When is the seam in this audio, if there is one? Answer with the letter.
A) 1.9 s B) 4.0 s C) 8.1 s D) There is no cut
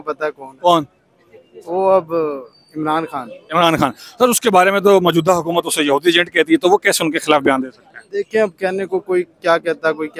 D